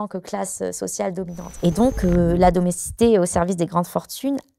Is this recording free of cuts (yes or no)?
no